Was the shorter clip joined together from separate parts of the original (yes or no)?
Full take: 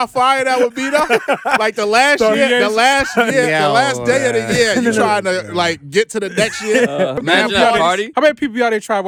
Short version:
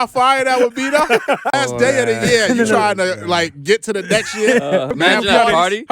yes